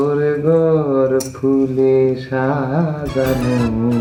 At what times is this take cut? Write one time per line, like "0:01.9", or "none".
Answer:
none